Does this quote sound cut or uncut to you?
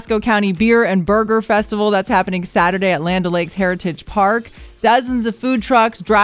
uncut